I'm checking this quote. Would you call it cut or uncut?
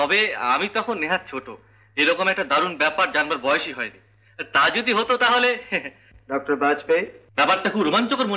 cut